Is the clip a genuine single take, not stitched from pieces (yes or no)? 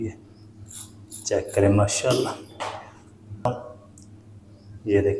no